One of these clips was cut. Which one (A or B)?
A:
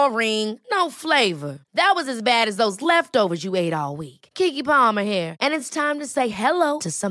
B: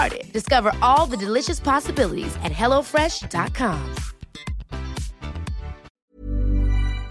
B